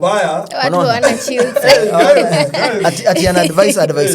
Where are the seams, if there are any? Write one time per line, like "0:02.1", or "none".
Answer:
none